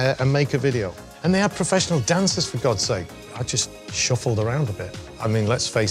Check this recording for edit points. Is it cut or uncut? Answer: cut